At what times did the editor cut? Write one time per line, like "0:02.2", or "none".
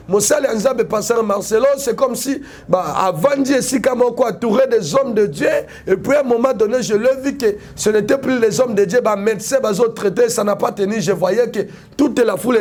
none

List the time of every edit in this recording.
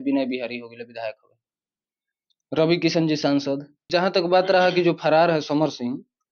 0:03.7

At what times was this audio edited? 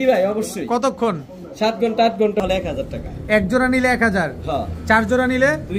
0:02.4

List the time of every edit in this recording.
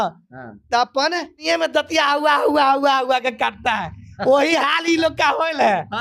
0:01.4

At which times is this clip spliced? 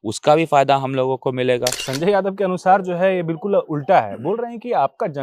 0:01.8

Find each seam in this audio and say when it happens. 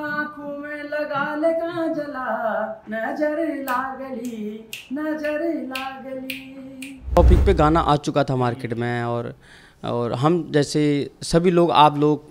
0:07.2

